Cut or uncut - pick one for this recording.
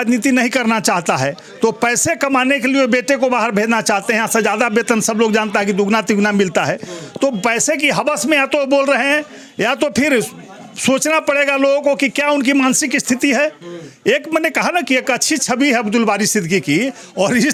uncut